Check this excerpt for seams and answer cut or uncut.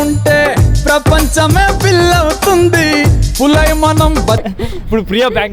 cut